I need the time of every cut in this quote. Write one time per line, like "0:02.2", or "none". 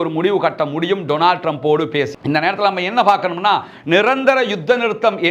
0:02.1